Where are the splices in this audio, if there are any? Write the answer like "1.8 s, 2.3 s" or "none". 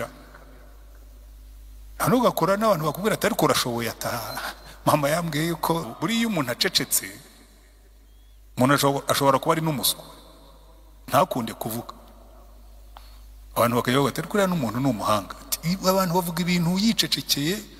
5.9 s

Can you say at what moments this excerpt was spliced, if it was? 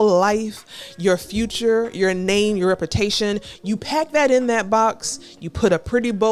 none

